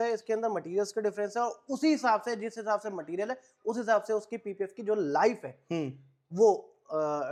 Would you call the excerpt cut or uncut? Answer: uncut